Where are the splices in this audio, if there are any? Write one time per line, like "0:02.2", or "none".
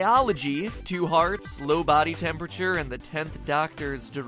0:02.5